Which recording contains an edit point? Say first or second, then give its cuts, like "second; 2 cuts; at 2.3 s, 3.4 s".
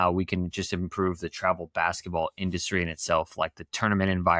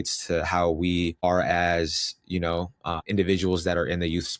second; 2 cuts; at 1.2 s, 3.0 s